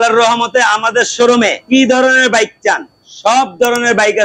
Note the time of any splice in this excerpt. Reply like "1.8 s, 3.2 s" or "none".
1.7 s